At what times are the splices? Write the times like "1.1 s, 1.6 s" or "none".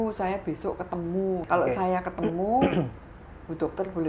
1.4 s